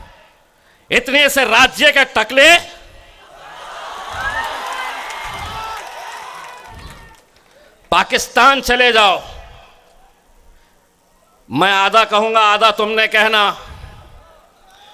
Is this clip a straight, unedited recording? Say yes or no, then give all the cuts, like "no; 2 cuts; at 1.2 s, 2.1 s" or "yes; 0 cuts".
yes; 0 cuts